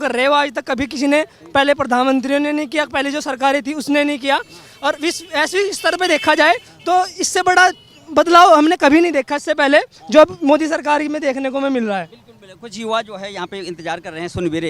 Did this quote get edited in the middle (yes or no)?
no